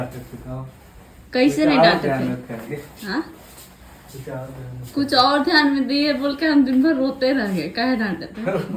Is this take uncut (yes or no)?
yes